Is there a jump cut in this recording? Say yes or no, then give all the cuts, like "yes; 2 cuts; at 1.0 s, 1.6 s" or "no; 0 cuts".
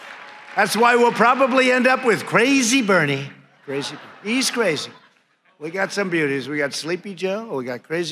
no; 0 cuts